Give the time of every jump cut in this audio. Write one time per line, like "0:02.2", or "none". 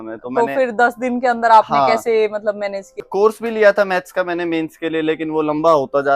0:03.0